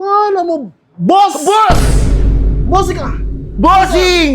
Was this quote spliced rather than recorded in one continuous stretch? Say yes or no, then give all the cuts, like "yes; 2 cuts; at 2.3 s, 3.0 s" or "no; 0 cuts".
no; 0 cuts